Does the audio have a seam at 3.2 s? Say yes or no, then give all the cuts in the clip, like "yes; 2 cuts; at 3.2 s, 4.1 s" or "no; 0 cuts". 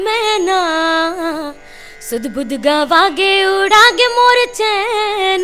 no; 0 cuts